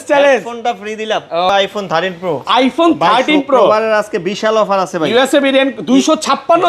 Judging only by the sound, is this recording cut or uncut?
cut